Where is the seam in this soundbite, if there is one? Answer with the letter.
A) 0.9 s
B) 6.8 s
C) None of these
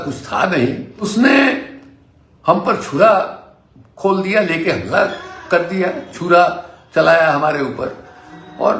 A